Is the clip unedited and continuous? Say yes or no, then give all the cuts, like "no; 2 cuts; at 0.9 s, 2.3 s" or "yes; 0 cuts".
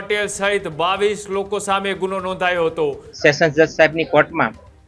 no; 1 cut; at 3.0 s